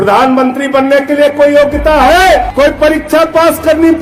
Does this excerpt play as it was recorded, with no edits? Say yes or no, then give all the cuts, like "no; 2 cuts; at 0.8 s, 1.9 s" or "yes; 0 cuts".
no; 1 cut; at 2.5 s